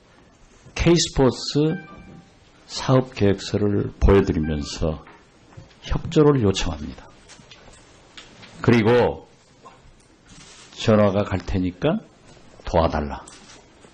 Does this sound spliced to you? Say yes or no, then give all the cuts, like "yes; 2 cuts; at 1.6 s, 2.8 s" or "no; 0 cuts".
no; 0 cuts